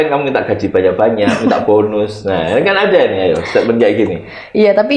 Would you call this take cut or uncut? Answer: uncut